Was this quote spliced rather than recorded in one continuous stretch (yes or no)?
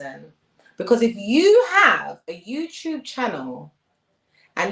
no